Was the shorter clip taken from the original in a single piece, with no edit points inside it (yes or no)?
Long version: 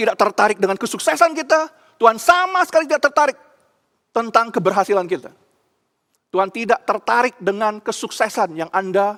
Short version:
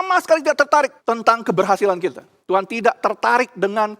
no